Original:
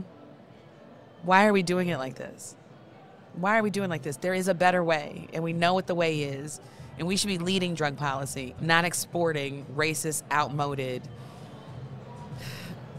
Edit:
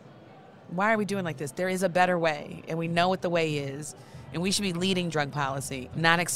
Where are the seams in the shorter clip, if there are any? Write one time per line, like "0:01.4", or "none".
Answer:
none